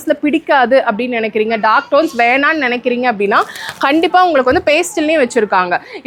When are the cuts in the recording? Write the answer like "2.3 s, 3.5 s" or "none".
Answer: none